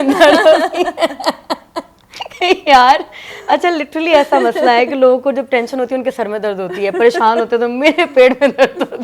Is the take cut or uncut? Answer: uncut